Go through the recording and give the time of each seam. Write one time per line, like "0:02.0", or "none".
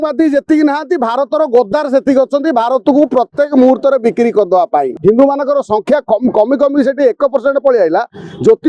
0:04.9